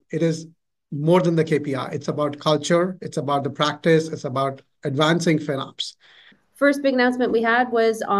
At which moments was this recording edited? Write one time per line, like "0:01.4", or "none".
0:06.3